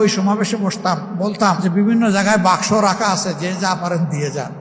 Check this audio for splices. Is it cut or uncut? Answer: uncut